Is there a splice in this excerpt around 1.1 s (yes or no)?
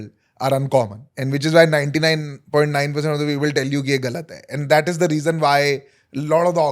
yes